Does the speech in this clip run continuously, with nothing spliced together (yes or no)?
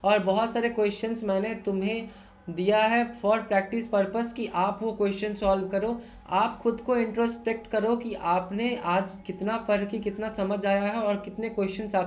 yes